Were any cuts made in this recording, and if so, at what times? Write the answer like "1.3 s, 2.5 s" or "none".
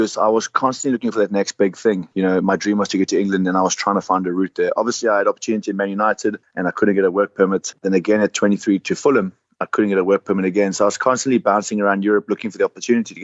7.7 s